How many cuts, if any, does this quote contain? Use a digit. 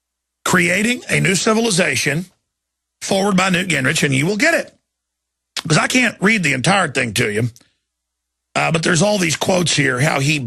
1